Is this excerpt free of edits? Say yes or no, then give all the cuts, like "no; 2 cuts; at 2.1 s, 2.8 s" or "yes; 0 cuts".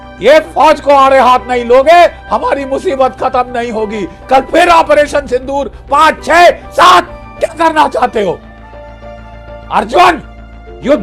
yes; 0 cuts